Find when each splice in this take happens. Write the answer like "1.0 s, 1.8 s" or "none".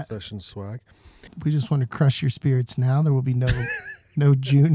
1.2 s